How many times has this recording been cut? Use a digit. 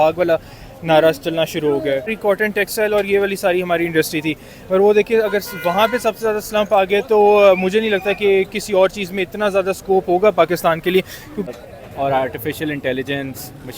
2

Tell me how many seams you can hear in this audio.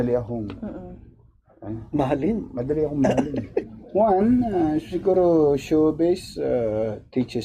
1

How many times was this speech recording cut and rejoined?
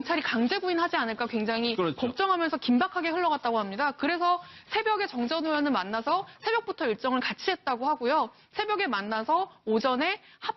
1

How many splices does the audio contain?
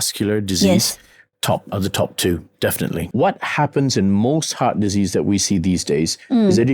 1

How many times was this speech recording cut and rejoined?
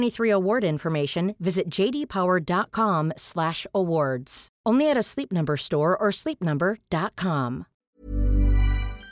1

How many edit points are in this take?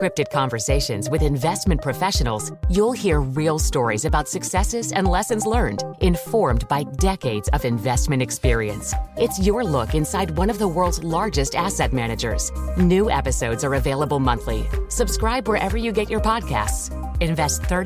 0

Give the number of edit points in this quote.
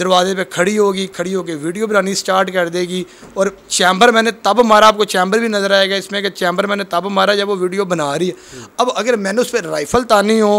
0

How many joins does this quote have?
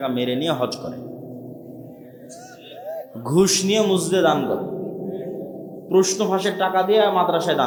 0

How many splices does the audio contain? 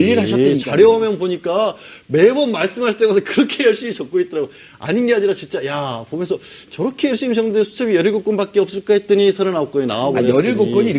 1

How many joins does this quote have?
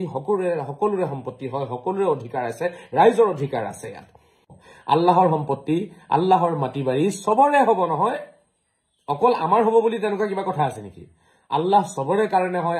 1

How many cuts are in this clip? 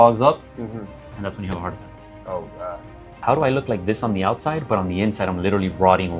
1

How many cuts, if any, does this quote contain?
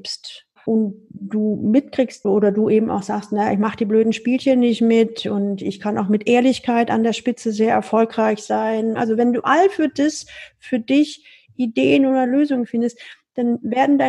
2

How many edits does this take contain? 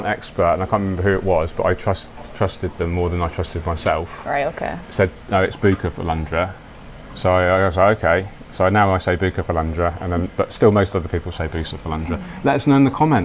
0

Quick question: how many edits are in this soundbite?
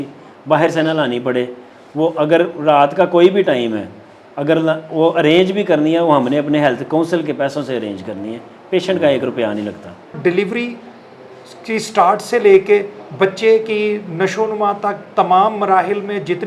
1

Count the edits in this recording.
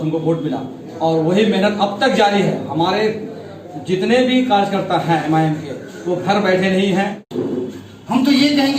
1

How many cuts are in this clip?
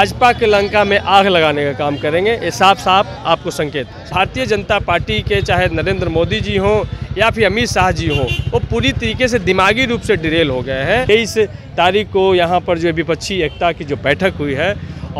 2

